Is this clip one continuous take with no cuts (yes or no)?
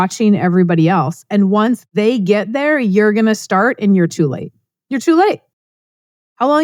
yes